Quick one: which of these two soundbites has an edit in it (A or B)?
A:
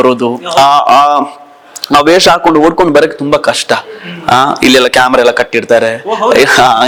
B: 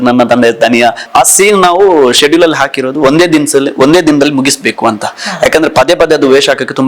B